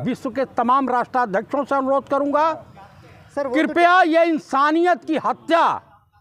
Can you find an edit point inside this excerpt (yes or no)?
no